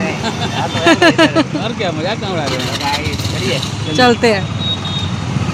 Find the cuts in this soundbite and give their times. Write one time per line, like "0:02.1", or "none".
none